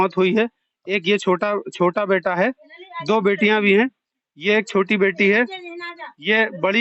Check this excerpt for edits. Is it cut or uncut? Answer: uncut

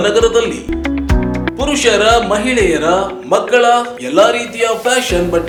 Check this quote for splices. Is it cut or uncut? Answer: uncut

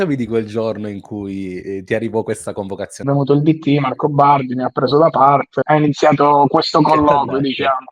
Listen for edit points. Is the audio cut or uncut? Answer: cut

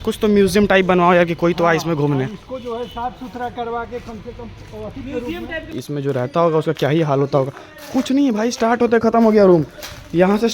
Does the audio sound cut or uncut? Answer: cut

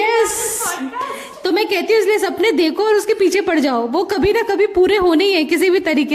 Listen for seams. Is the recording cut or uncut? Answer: uncut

